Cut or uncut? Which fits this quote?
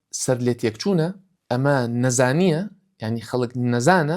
cut